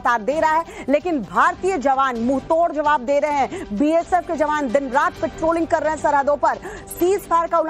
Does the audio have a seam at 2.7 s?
no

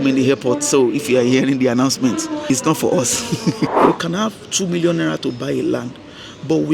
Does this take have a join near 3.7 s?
yes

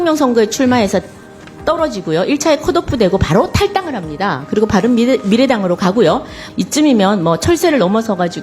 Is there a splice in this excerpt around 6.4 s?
yes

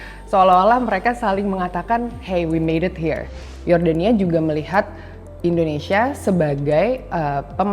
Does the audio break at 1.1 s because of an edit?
no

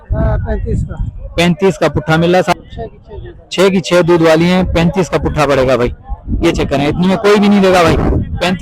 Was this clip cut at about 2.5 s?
yes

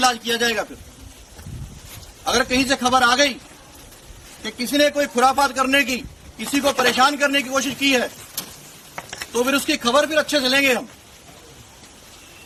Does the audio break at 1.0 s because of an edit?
no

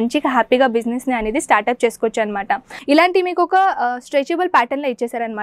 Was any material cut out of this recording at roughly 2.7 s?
yes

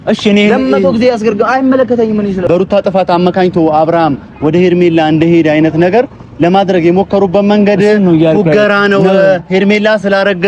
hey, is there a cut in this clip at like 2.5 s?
yes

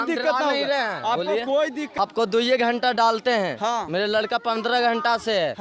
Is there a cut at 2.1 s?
yes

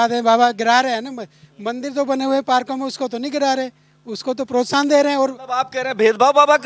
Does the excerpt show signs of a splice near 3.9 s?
no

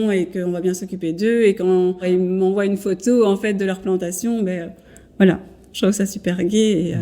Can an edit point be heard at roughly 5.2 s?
no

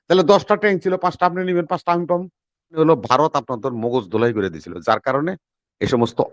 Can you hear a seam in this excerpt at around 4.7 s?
no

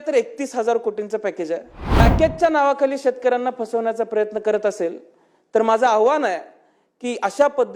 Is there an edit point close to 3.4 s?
no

